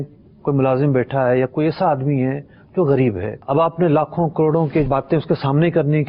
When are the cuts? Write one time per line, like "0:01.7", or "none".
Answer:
0:03.3
0:04.9